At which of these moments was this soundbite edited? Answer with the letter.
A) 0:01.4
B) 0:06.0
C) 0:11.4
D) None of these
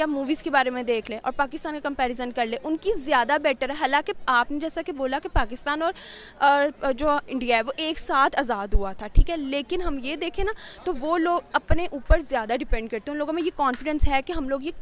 D